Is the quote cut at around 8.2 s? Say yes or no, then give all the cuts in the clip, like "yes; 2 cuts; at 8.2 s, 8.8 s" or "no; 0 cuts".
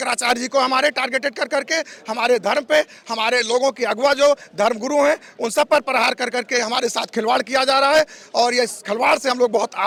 no; 0 cuts